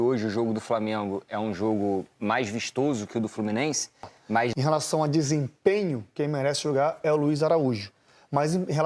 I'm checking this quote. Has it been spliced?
yes; 1 cut; at 4.5 s

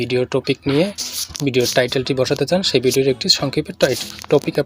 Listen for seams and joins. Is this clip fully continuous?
yes; 0 cuts

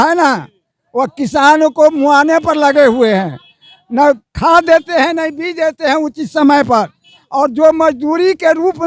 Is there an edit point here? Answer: no; 0 cuts

